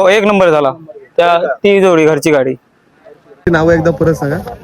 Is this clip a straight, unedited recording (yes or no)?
no